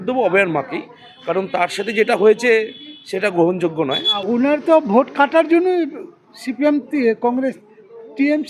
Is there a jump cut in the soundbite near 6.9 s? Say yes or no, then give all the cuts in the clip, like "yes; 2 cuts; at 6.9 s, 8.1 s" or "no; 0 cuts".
no; 1 cut; at 4.2 s